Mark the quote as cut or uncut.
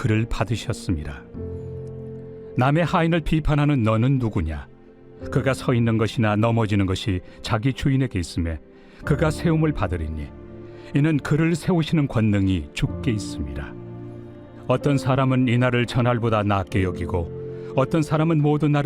cut